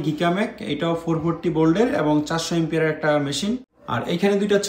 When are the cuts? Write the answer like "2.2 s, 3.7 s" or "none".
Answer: 3.7 s

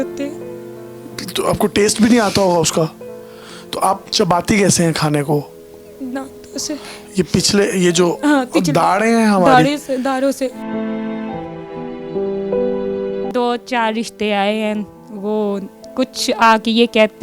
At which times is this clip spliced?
13.3 s

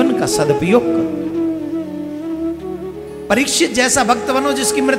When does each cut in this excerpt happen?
none

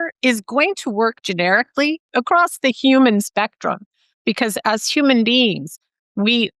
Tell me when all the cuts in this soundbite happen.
2.1 s

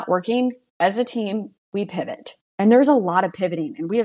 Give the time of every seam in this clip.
1.6 s

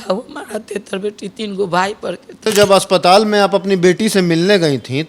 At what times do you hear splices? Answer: 2.4 s

